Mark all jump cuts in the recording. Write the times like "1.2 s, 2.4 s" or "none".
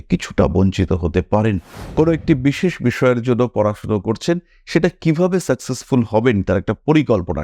1.8 s